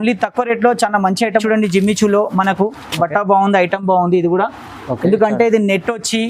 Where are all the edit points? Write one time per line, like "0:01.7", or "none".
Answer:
0:01.4